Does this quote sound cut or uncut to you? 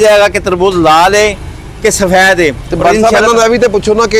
uncut